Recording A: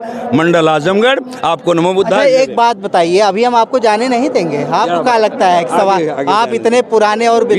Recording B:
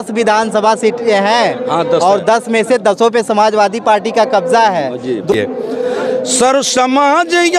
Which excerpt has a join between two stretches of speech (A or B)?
B